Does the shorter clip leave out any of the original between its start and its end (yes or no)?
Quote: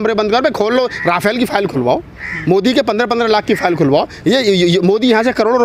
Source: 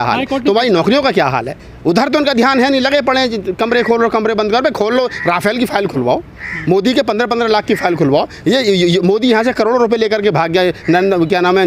no